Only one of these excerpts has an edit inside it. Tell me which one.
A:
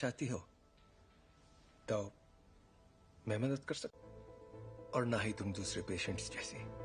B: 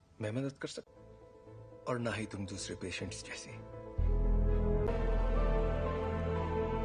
B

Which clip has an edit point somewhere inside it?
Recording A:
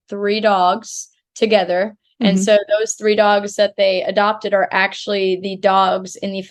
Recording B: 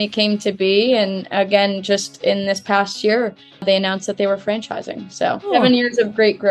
B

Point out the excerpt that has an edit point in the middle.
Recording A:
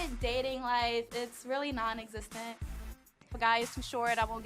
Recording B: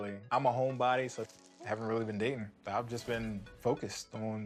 A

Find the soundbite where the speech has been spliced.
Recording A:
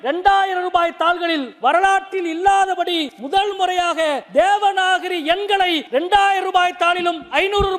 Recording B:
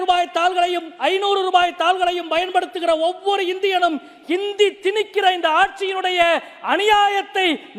A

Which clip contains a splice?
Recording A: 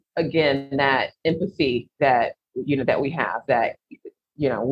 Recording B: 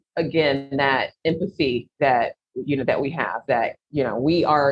B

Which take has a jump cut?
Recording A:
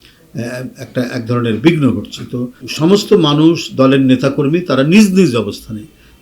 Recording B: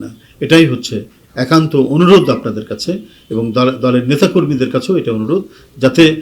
A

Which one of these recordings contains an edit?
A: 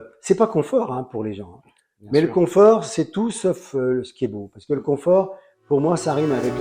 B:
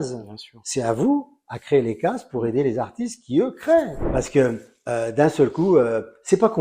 B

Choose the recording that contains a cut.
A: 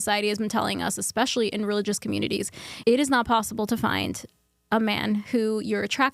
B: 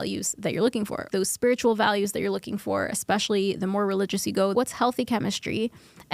B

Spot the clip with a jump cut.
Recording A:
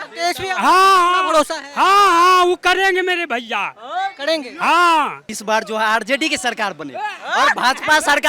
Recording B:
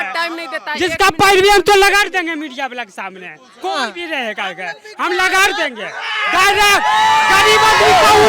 A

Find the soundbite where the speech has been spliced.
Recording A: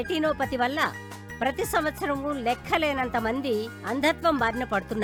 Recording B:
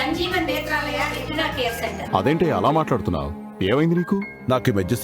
B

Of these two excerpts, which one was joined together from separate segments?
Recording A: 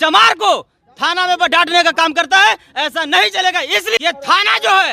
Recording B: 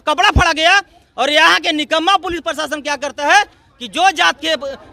A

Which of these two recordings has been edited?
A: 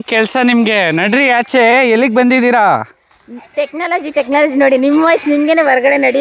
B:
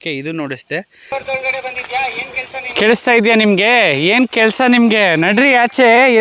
B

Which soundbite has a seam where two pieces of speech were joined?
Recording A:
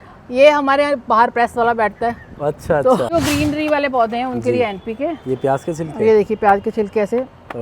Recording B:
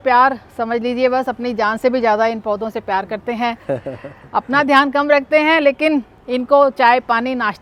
A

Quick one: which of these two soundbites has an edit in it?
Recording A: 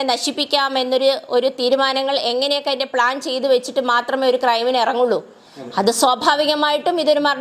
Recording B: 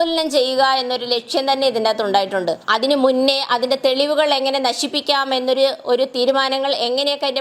B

